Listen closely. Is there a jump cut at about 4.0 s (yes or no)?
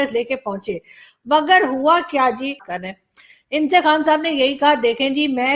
no